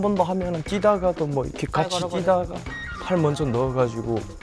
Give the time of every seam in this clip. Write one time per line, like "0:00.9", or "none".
none